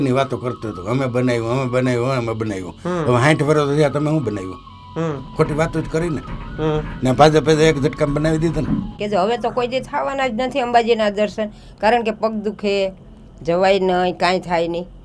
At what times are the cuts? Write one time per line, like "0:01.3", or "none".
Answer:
0:08.9